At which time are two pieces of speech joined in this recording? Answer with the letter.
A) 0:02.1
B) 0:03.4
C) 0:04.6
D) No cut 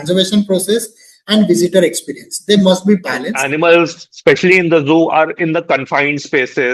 B